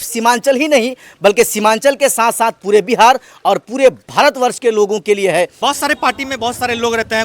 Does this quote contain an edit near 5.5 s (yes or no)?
yes